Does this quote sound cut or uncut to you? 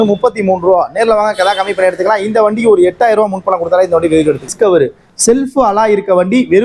cut